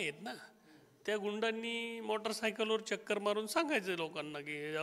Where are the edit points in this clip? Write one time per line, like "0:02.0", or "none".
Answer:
none